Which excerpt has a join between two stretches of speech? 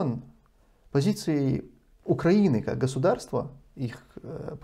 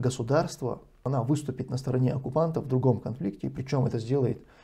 second; 1 cut; at 1.1 s

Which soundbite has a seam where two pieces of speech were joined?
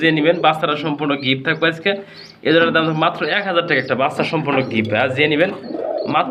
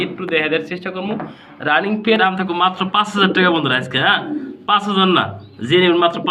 second; 1 cut; at 2.2 s

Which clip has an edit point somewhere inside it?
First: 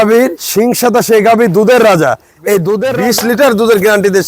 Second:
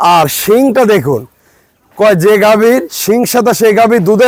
first; 1 cut; at 2.7 s

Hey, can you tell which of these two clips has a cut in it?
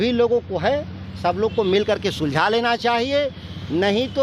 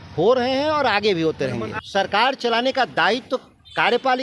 second; 1 cut; at 1.7 s

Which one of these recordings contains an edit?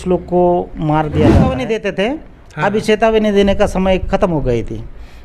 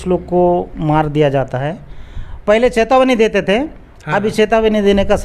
first; 1 cut; at 1.7 s

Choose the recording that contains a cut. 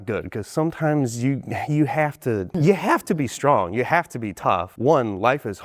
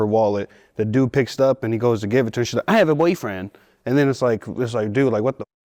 first; 2 cuts; at 2.5 s, 4.7 s

